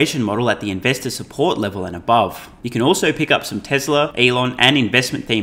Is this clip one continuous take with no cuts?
no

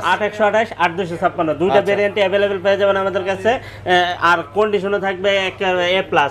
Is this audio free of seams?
yes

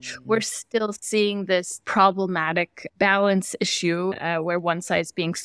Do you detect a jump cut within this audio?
yes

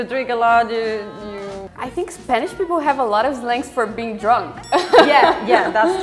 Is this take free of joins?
no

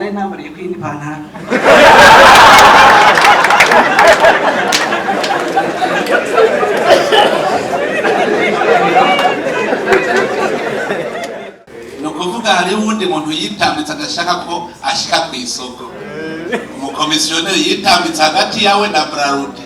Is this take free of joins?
no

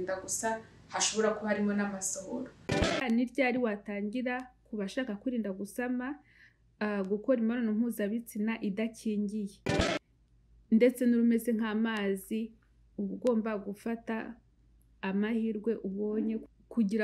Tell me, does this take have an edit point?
yes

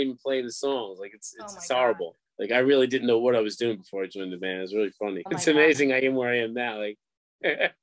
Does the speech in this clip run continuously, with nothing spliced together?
no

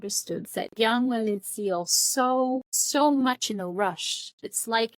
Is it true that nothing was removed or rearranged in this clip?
no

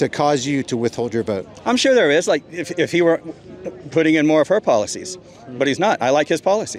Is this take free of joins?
yes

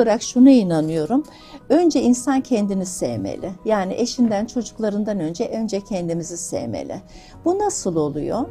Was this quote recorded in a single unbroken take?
yes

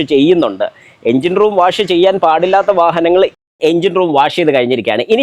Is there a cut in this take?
yes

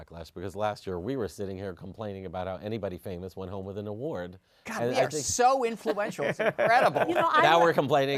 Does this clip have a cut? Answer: no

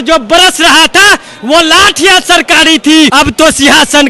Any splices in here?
yes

